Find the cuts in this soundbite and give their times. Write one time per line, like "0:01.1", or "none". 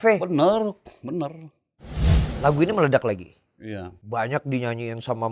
0:02.0